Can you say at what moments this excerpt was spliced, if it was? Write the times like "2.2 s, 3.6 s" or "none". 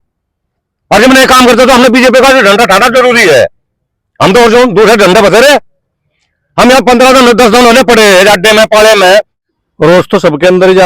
9.3 s